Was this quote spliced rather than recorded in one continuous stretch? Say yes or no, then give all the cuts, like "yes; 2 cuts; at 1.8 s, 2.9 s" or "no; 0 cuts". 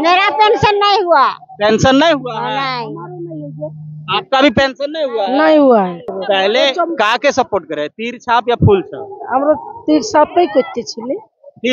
yes; 1 cut; at 6.1 s